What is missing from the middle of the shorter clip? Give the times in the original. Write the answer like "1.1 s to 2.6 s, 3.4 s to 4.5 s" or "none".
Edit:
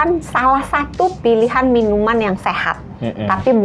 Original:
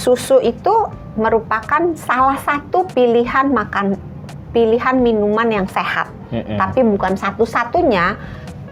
2.9 s to 4.5 s